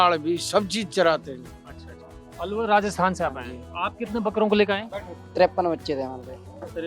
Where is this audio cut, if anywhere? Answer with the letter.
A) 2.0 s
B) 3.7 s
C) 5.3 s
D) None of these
A